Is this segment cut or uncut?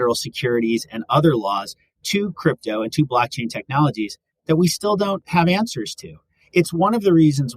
cut